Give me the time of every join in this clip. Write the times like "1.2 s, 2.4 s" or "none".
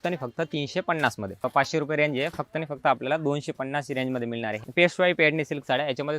1.5 s, 4.6 s